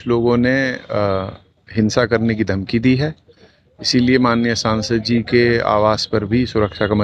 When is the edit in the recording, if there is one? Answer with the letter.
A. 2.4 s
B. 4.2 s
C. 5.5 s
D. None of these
D